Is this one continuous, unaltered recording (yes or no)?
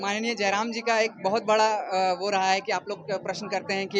yes